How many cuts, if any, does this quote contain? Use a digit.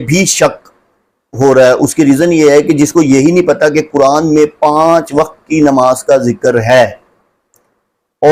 0